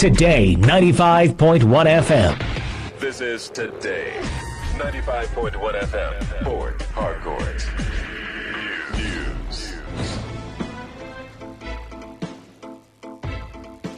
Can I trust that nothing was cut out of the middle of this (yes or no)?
no